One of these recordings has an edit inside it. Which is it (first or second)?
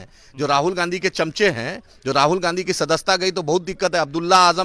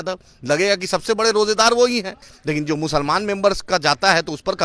second